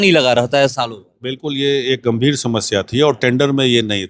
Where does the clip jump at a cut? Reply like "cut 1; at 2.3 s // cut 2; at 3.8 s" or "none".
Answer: none